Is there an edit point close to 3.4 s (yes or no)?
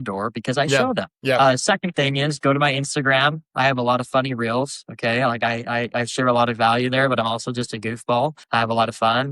no